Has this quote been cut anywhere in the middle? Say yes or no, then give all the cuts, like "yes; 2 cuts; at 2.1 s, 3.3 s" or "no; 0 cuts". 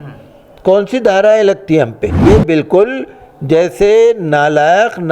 yes; 1 cut; at 2.2 s